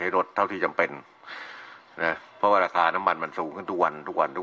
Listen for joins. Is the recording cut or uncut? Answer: uncut